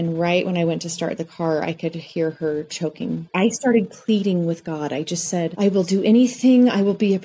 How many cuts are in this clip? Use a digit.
1